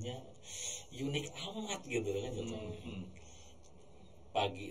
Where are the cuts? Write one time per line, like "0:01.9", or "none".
none